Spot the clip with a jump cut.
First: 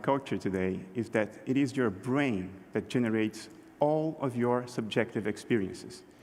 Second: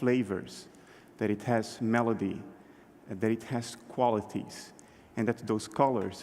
second; 1 cut; at 2.4 s

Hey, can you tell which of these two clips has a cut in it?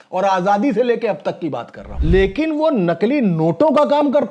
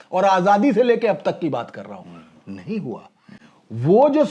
first; 1 cut; at 1.8 s

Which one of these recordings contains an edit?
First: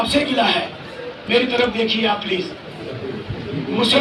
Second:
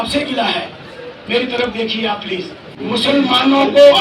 second; 1 cut; at 2.7 s

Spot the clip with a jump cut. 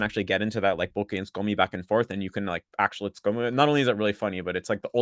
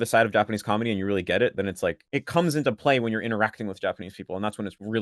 second; 1 cut; at 2.0 s

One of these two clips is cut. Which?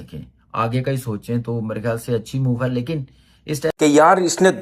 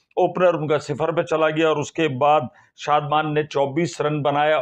first; 1 cut; at 3.6 s

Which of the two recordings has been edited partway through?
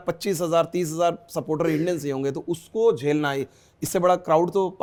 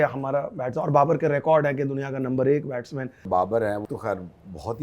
second; 2 cuts; at 3.2 s, 3.8 s

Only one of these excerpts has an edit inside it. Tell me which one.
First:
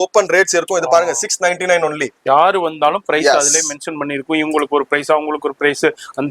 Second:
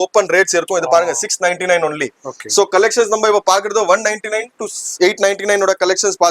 first; 1 cut; at 2.1 s

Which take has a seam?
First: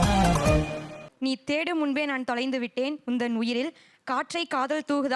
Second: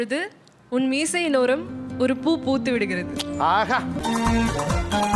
first; 1 cut; at 1.2 s

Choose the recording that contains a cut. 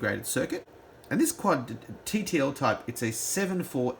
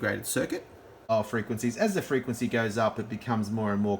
second; 1 cut; at 1.1 s

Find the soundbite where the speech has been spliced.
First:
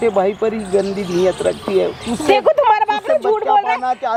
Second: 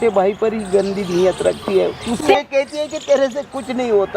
second; 1 cut; at 2.4 s

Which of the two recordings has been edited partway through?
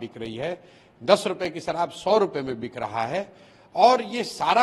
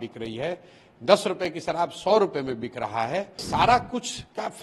second; 1 cut; at 3.4 s

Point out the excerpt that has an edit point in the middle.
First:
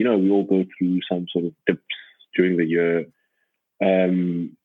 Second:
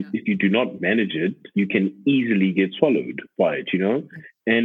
second; 1 cut; at 1.4 s

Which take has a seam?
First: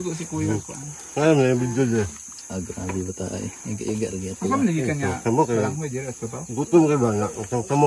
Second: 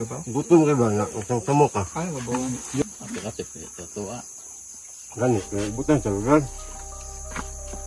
second; 1 cut; at 2.8 s

